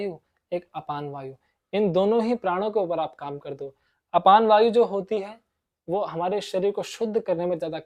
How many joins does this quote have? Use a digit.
0